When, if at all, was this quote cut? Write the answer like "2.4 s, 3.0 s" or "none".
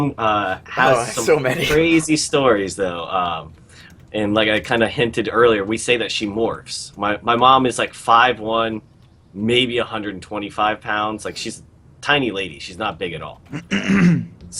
4.6 s